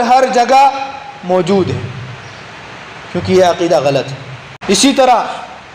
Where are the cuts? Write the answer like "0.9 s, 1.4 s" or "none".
4.6 s